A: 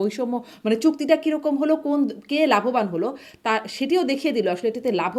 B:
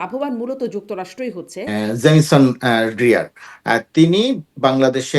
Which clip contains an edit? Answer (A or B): B